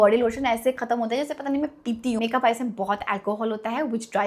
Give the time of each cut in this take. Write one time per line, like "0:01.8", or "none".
0:02.2

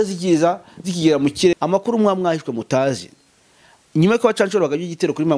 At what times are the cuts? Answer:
0:01.5

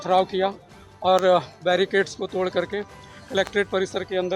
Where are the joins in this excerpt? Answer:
none

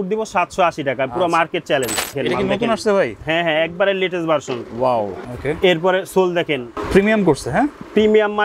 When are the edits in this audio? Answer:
0:02.1
0:05.2
0:06.8

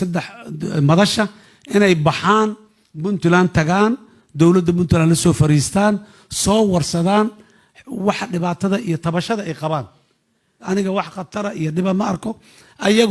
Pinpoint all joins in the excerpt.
0:10.6

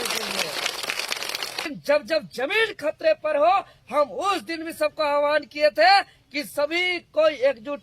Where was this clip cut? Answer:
0:01.7

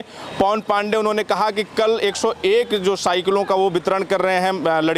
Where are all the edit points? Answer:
none

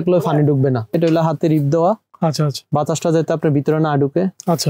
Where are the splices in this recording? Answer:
0:01.0

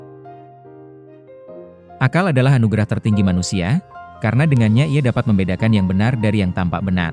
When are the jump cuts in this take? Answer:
0:02.0

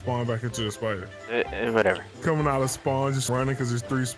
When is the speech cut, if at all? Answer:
0:01.1
0:02.1
0:03.3

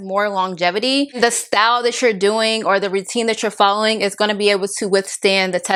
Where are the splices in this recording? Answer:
none

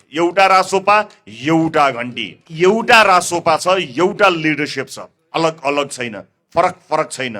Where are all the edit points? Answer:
0:02.4

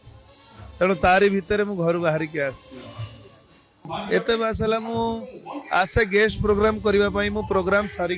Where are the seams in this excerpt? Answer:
0:03.9

